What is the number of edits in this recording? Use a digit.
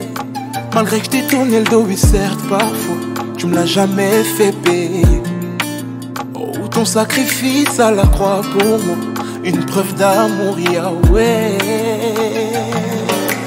0